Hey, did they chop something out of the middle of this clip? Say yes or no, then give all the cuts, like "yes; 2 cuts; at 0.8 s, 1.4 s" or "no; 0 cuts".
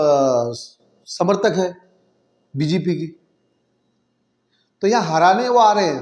no; 0 cuts